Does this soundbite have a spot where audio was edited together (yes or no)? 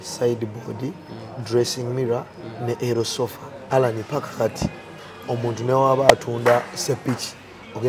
yes